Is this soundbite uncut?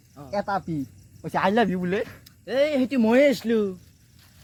yes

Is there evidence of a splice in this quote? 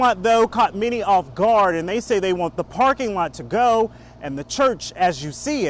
no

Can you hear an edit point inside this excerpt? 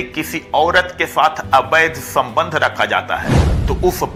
no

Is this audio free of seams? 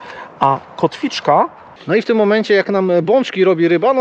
no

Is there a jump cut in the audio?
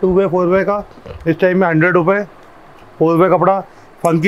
no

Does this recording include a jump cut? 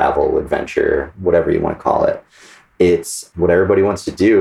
yes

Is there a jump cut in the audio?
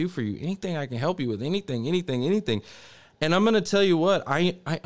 no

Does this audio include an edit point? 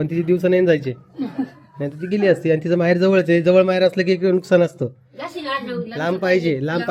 no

